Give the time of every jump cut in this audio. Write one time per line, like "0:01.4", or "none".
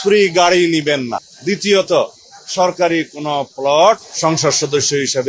0:01.3
0:04.1